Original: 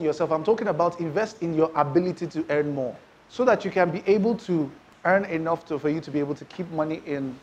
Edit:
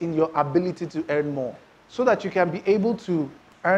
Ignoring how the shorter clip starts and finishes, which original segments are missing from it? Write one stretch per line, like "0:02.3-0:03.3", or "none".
none

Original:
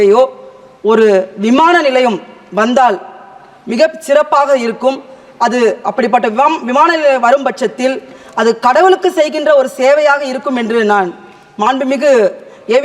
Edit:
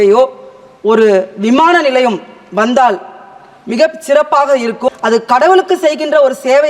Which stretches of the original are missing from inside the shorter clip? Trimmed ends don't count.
0:05.0-0:08.3

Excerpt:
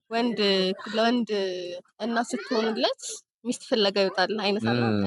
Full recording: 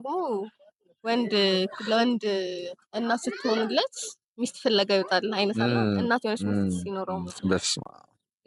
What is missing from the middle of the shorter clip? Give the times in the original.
none

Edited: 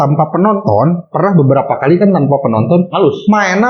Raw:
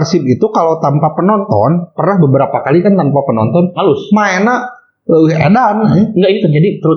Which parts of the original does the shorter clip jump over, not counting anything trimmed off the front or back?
none

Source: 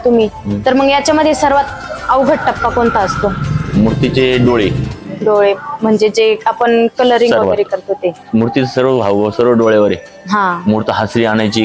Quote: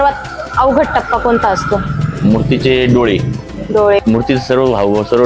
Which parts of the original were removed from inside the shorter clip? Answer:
0:05.5-0:08.3

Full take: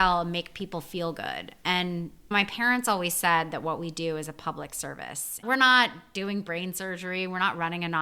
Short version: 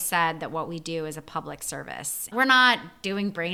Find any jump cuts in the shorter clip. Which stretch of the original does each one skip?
none

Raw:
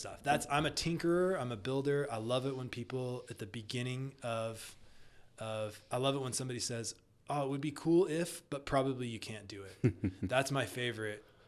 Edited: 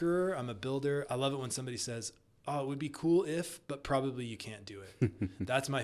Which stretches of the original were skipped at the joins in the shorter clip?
0:02.1-0:05.9

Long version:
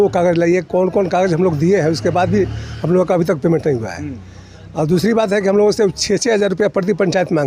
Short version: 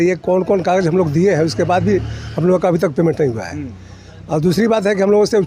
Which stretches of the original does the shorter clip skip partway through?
none

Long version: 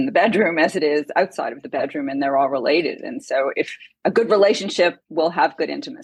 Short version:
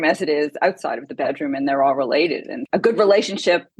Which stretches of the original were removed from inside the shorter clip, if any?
0:03.1-0:03.8

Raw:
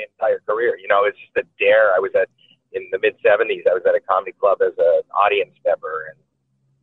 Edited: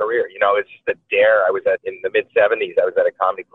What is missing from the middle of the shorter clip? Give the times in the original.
0:02.4-0:02.8

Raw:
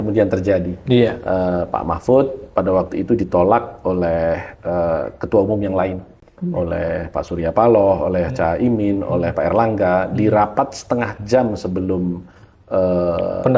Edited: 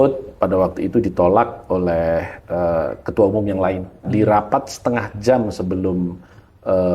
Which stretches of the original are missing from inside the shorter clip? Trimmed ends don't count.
0:06.2-0:10.1

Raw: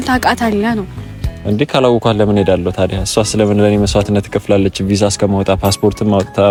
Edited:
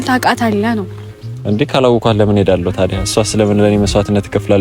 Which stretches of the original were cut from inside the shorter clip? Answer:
none

